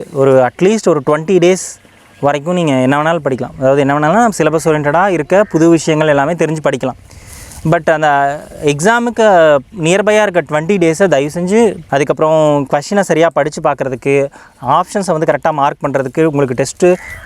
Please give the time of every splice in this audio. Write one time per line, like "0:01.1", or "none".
0:11.8

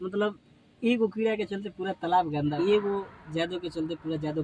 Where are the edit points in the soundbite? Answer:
0:02.5

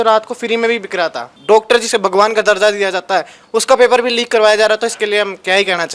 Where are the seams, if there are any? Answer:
0:01.3

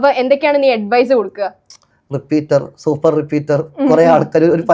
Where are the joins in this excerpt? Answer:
0:01.8

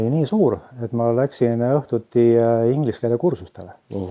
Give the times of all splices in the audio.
none

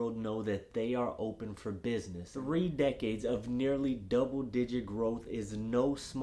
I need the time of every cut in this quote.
0:02.2

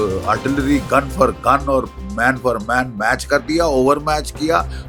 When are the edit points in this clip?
none

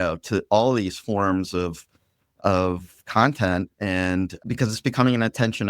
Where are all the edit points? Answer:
0:04.5

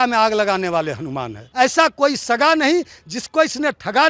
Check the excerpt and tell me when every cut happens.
0:01.5

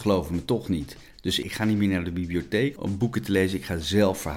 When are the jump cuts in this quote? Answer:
0:02.8

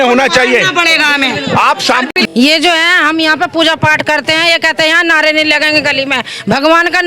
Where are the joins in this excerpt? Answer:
0:02.2

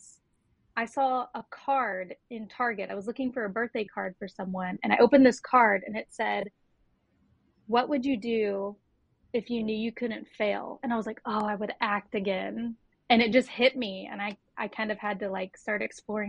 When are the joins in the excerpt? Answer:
none

